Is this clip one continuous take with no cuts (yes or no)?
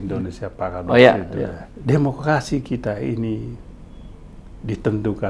no